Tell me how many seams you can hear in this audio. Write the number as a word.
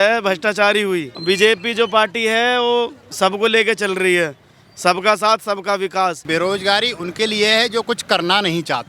two